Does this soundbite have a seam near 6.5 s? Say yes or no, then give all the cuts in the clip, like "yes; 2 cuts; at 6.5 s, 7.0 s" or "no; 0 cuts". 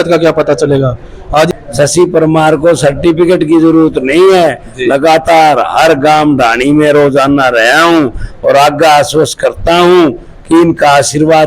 no; 1 cut; at 1.5 s